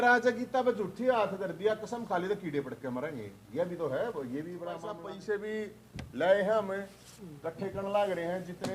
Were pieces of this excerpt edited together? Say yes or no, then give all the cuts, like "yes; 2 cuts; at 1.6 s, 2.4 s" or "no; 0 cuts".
yes; 1 cut; at 5.0 s